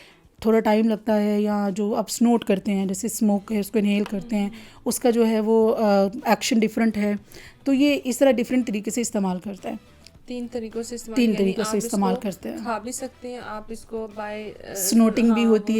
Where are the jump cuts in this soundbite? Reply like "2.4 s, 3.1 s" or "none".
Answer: none